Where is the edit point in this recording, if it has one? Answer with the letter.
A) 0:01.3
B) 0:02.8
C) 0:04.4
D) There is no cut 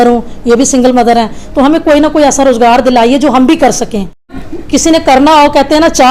C